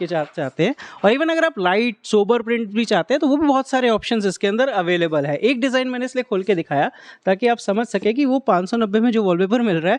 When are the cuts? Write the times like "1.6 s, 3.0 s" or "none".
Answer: none